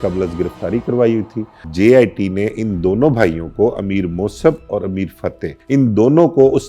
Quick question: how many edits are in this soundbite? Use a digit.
2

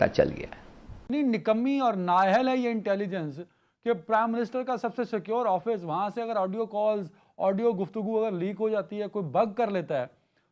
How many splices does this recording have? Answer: 1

